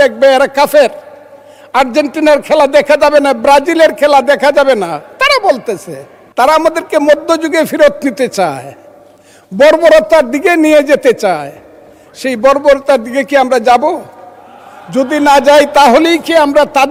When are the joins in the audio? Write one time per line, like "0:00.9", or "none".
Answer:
none